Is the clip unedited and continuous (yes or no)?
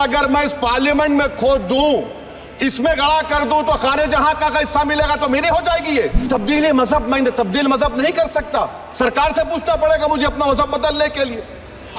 no